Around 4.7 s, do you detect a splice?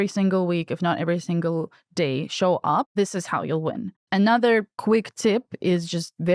yes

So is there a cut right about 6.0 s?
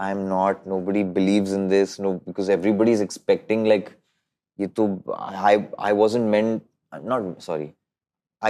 no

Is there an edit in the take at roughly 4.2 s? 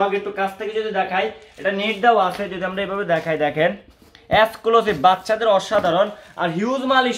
no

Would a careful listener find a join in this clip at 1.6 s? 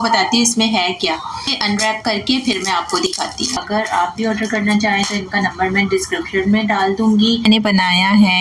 yes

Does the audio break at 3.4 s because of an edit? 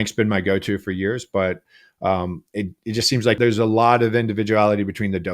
yes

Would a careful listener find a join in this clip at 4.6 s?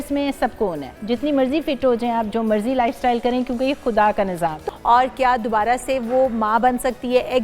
yes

